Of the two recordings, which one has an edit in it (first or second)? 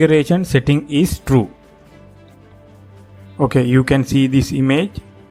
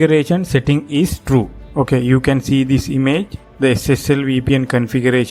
second